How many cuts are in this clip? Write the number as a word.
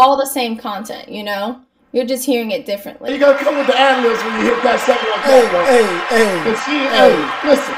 one